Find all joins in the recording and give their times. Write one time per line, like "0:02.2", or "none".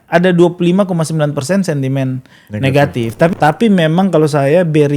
0:03.3